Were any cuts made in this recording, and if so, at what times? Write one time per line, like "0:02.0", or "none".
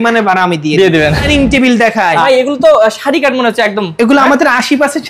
0:01.2
0:02.2